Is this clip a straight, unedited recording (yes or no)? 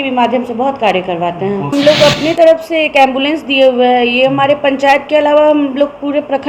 no